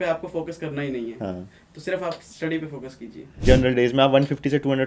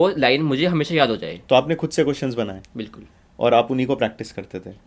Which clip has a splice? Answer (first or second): first